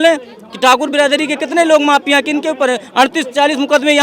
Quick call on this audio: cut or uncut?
uncut